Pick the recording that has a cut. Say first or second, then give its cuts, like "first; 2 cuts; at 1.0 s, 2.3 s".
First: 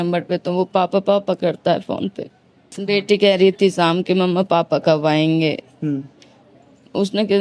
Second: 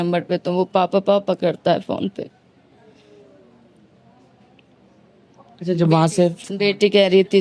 first; 1 cut; at 2.7 s